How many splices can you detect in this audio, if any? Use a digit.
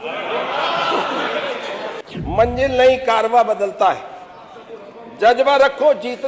1